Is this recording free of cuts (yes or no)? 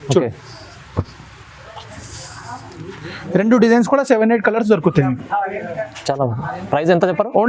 yes